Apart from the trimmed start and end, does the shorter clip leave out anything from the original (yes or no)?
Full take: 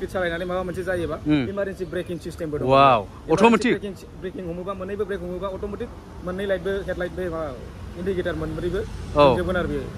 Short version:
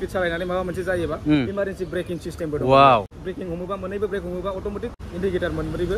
yes